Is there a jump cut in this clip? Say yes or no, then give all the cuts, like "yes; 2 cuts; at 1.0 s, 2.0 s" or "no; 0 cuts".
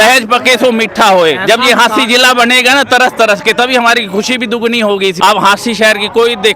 yes; 1 cut; at 5.1 s